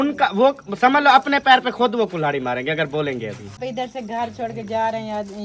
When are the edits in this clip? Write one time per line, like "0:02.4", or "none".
0:03.6

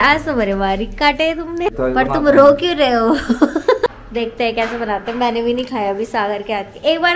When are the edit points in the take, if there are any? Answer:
0:01.7
0:03.9

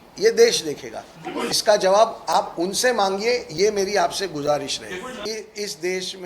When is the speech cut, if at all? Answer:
0:01.5
0:05.2

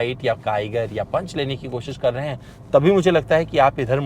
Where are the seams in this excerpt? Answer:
none

